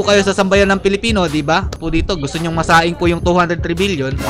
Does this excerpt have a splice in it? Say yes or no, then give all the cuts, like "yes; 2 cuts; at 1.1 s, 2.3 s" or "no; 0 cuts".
yes; 1 cut; at 1.8 s